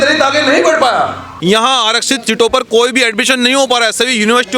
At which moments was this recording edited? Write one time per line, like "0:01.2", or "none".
0:01.3